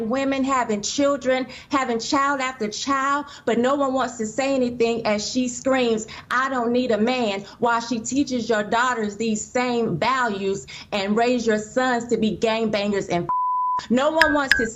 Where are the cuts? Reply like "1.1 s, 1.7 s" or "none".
none